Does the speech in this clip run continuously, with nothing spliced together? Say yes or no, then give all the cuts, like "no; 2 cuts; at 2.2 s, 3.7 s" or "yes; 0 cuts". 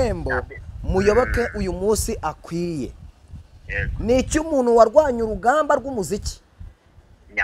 yes; 0 cuts